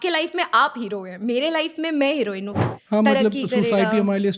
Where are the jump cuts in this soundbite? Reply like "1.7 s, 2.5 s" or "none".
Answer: 2.7 s